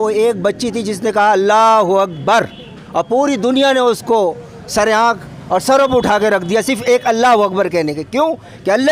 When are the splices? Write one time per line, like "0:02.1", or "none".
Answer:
none